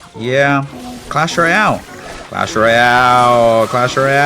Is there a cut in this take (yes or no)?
yes